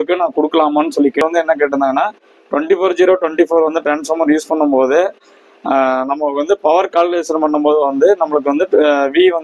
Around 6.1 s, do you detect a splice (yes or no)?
no